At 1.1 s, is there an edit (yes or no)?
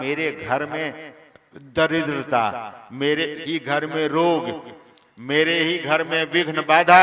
no